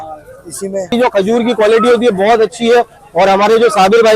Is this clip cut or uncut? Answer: cut